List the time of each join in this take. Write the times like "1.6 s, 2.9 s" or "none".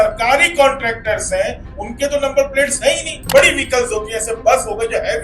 3.2 s